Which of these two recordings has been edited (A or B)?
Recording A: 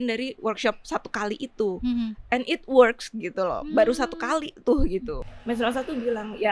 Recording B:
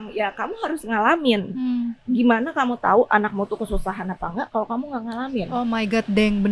A